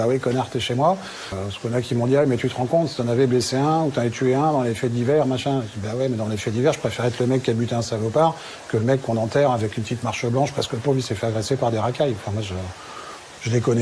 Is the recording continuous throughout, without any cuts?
no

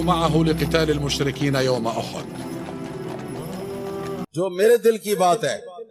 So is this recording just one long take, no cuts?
no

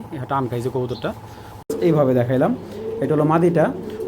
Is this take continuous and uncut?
no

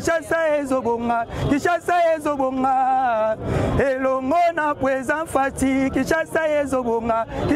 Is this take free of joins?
yes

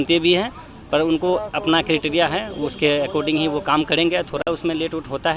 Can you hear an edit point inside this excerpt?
no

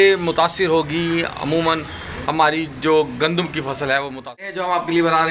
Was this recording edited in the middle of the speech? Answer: yes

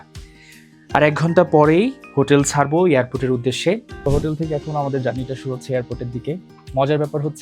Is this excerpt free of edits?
no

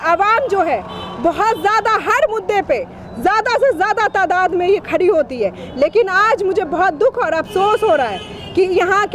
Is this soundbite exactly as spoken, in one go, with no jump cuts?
yes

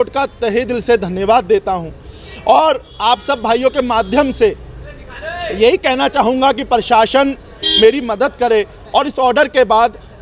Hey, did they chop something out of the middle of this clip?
no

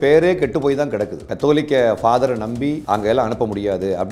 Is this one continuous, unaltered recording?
no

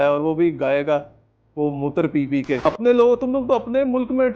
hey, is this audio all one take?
no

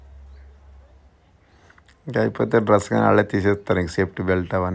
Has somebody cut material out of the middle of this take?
no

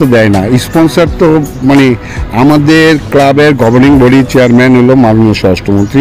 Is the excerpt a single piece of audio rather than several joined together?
yes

